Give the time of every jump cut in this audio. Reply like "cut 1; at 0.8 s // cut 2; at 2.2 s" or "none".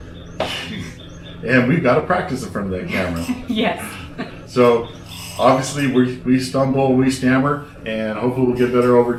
none